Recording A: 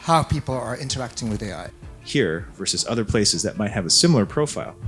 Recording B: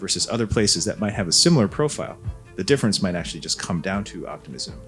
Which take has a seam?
A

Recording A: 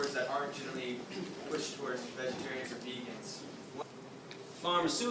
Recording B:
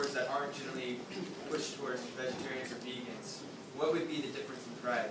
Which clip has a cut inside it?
B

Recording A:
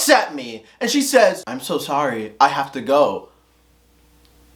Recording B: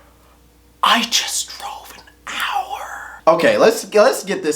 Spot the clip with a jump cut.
B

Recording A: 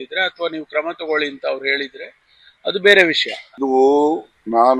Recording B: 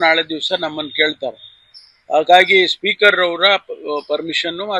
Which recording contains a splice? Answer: A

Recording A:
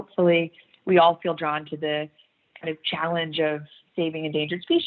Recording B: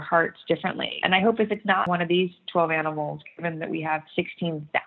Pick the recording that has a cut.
B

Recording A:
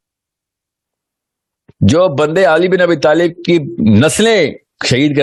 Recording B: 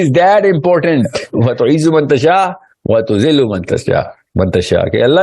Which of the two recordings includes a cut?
B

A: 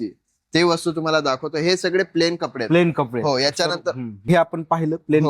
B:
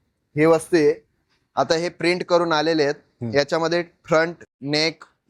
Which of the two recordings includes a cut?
A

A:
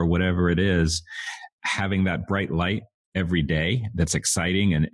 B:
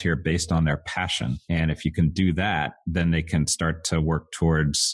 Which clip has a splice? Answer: B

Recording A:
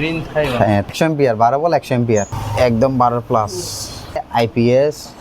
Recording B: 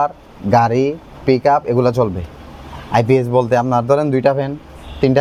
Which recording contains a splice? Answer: A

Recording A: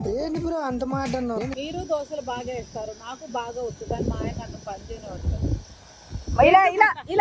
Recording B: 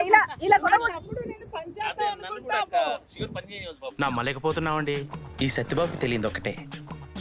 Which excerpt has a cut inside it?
A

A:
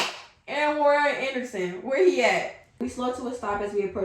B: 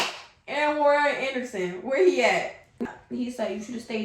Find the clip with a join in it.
B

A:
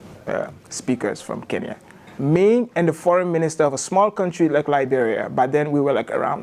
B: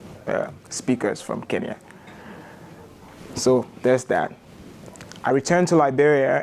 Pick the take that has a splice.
A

